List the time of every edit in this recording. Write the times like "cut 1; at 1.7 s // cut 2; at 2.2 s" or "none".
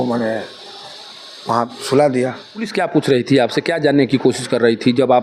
cut 1; at 2.7 s